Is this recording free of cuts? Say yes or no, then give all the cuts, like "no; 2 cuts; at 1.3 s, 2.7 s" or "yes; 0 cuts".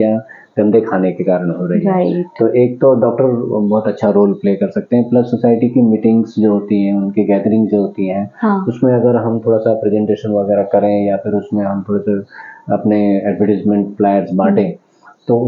yes; 0 cuts